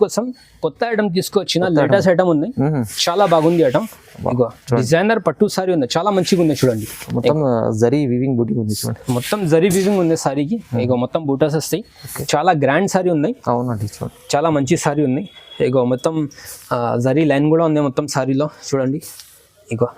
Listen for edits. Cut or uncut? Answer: cut